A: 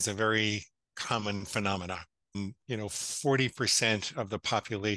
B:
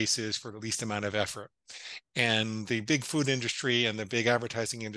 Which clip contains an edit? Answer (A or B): A